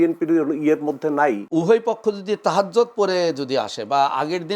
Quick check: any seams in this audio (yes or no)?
yes